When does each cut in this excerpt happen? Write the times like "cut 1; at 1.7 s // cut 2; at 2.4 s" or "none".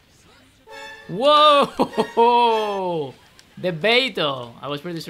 cut 1; at 1.0 s